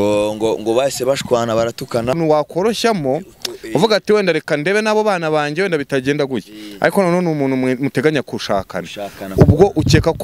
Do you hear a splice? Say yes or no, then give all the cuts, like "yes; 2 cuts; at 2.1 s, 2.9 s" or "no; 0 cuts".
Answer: yes; 1 cut; at 2.1 s